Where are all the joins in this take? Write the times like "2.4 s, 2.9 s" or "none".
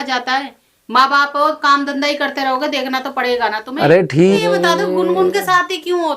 4.4 s